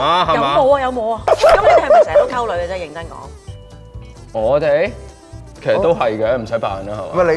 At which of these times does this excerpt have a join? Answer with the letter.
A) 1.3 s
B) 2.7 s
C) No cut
A